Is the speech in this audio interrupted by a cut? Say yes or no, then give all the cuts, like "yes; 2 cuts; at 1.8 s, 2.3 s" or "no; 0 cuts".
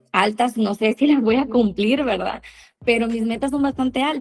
no; 0 cuts